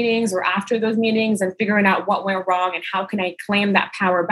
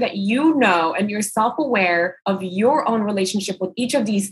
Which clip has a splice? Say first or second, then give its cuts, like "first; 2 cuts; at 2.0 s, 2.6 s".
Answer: second; 1 cut; at 2.2 s